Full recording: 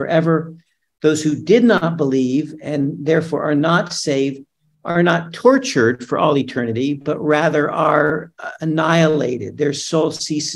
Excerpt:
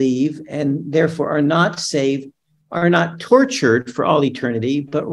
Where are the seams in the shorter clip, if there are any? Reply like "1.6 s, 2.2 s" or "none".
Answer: none